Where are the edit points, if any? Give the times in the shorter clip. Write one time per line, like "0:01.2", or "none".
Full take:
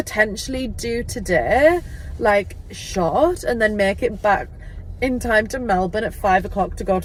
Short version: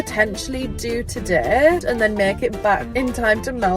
0:01.8
0:02.9